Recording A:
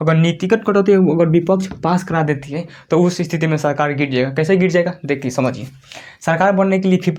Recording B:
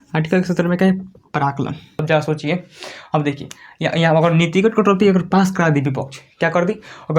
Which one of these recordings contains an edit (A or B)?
B